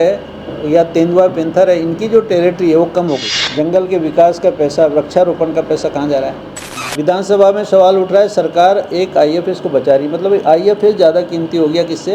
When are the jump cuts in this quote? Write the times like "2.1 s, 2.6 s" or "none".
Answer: 3.3 s, 6.8 s